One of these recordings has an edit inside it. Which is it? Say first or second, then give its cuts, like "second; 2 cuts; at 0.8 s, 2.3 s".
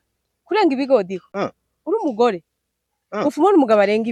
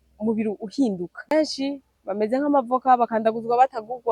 second; 1 cut; at 1.3 s